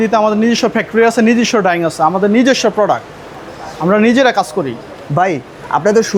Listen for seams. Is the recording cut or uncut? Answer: uncut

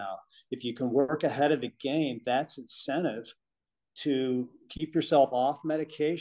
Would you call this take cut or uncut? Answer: uncut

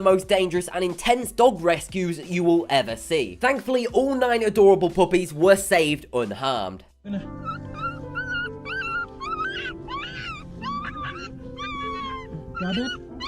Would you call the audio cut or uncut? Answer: cut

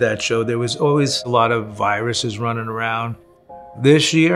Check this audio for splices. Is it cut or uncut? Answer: uncut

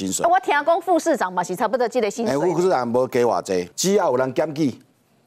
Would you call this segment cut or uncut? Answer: cut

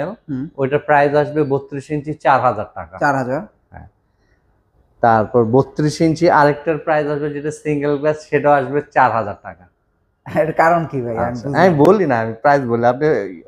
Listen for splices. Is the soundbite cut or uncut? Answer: uncut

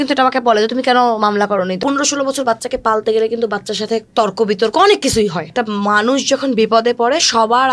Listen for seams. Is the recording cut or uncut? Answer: cut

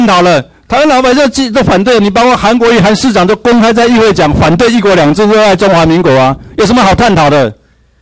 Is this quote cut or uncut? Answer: uncut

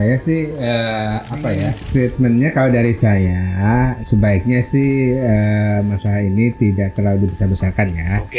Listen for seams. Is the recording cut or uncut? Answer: cut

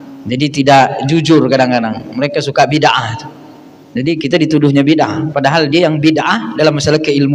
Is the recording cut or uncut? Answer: uncut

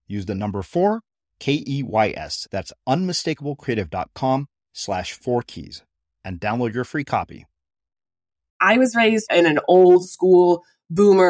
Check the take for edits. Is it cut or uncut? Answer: cut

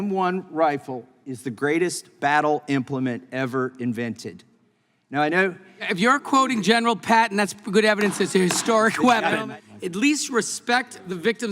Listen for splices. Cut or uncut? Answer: cut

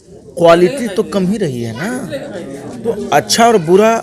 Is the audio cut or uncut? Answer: cut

